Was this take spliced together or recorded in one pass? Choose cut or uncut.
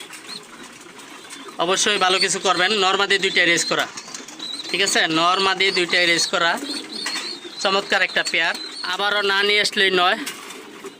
cut